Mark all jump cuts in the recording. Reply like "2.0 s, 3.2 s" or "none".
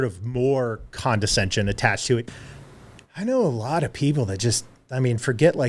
2.2 s